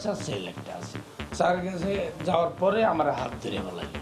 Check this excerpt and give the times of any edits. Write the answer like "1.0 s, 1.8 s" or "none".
1.0 s